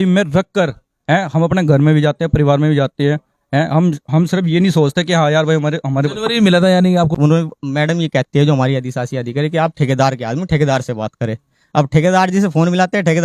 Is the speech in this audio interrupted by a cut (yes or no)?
yes